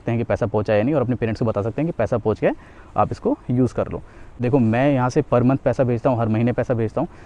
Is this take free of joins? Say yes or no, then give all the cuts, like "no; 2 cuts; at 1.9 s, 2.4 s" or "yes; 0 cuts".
no; 1 cut; at 4.3 s